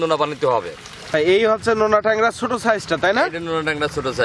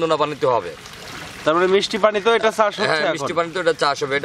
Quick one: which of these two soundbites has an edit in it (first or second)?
first